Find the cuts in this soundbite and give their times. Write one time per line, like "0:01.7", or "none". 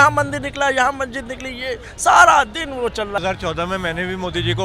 0:03.2